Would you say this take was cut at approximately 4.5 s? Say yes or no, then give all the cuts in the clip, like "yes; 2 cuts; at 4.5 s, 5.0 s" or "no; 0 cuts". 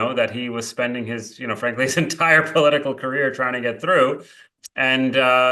yes; 1 cut; at 4.5 s